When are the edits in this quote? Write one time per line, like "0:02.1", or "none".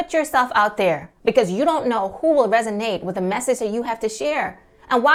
none